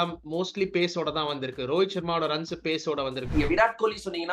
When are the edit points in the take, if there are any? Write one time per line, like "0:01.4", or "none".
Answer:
0:03.3